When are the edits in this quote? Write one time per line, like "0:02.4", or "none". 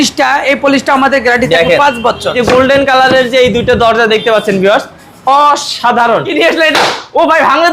0:02.4
0:06.3